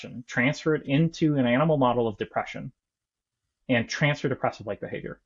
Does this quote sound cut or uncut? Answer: uncut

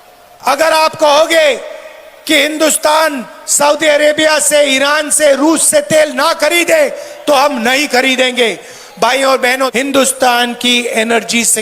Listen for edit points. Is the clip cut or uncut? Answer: cut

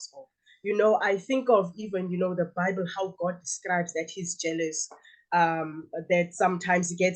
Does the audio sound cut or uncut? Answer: uncut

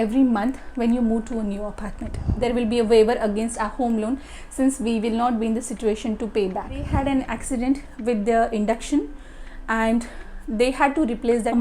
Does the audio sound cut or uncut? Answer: cut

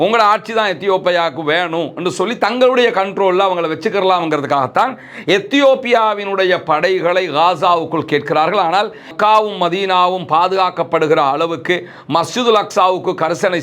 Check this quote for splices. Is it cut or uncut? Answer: cut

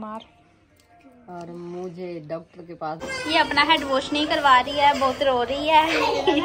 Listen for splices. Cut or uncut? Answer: cut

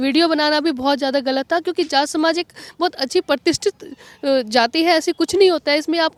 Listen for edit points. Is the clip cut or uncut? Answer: uncut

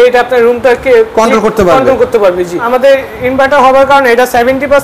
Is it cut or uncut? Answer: cut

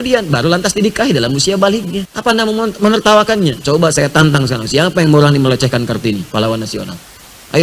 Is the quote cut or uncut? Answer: cut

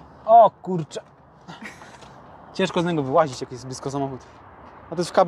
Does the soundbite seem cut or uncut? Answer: uncut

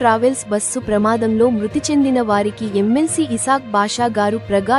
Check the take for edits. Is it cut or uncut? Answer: uncut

